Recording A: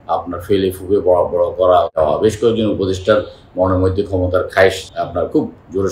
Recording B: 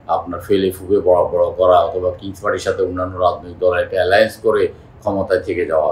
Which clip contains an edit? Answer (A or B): A